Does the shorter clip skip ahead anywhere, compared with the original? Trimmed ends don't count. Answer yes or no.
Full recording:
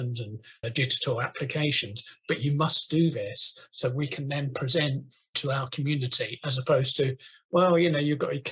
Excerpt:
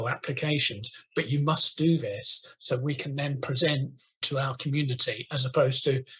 no